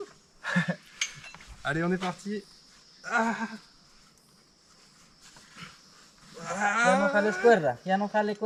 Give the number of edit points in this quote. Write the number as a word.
zero